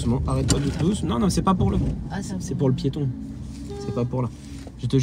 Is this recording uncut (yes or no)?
yes